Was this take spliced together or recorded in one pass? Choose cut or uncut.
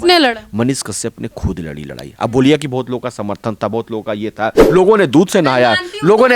cut